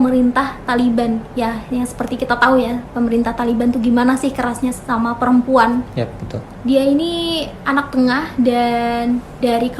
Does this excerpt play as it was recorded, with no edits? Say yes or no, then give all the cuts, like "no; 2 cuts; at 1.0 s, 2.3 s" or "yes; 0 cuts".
no; 1 cut; at 6.5 s